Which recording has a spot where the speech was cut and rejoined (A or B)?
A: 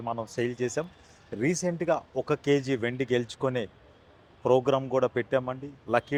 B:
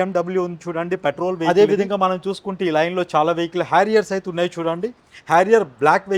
B